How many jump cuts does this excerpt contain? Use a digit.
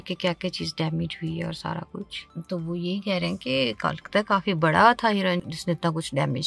1